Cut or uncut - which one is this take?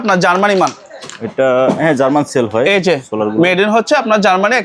uncut